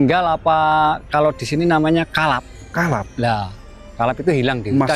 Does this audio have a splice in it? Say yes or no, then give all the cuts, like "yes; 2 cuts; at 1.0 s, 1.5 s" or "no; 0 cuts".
no; 0 cuts